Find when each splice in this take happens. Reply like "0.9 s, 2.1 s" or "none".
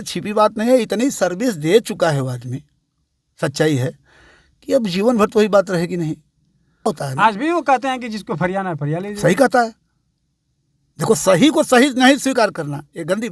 6.9 s